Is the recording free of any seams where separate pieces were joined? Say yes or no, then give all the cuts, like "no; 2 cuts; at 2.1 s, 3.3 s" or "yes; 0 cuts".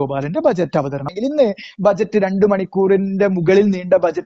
no; 1 cut; at 1.1 s